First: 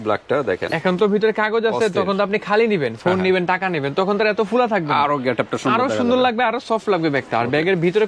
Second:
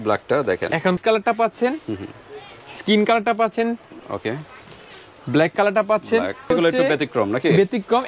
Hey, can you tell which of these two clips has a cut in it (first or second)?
second